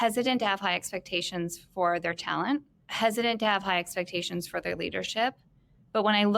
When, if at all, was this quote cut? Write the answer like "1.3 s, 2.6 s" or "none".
2.8 s